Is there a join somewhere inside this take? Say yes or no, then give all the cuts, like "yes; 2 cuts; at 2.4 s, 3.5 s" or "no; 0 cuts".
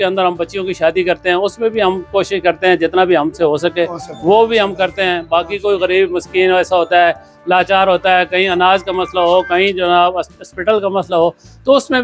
no; 0 cuts